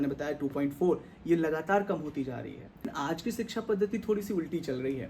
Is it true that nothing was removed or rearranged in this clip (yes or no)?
no